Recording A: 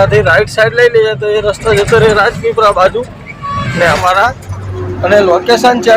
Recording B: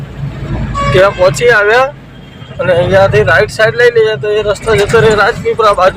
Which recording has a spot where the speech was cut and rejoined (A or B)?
A